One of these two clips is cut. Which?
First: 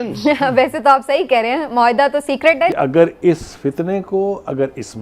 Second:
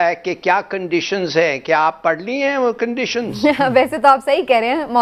first; 1 cut; at 2.7 s

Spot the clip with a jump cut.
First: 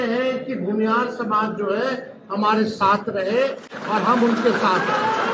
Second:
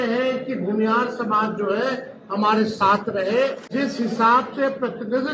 second; 1 cut; at 3.7 s

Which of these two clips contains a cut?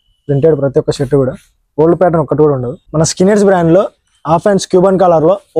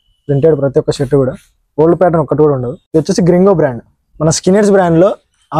first; 1 cut; at 2.7 s

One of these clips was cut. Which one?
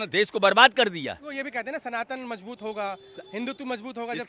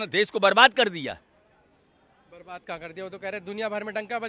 first; 1 cut; at 1.2 s

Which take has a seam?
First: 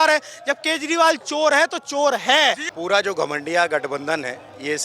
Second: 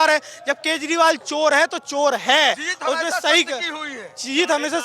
first; 1 cut; at 2.7 s

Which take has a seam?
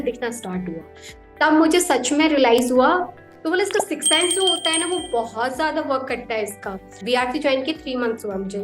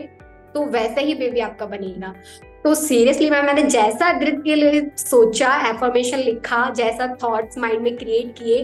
first; 2 cuts; at 3.1 s, 7.0 s

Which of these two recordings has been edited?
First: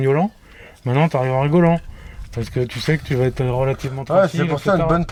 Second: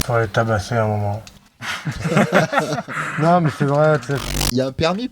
second; 2 cuts; at 1.5 s, 4.1 s

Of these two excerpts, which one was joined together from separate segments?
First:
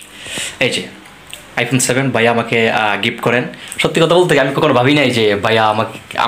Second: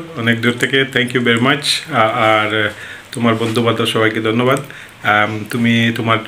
first; 1 cut; at 3.6 s

